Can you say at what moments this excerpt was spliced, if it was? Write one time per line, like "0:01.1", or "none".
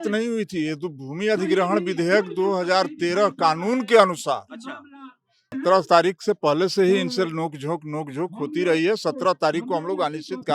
0:05.5